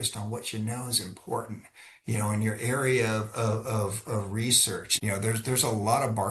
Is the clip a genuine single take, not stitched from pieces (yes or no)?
no